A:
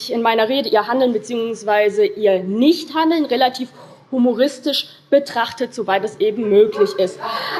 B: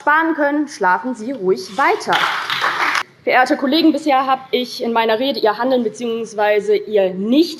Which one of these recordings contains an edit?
B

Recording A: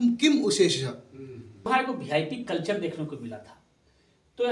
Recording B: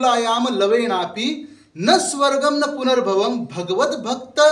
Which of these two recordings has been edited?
A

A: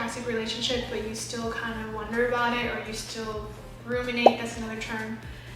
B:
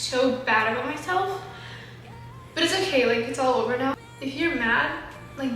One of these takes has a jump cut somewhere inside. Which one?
B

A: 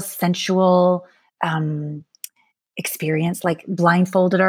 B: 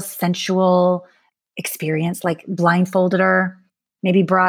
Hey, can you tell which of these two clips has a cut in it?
B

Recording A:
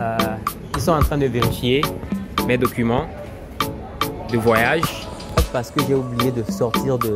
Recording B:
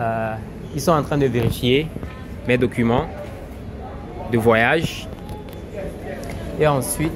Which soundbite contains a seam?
A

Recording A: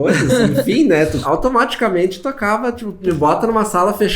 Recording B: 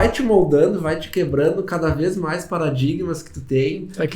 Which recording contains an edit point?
A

